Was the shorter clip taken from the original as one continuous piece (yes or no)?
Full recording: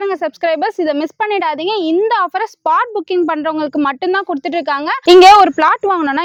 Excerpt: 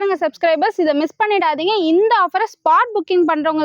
yes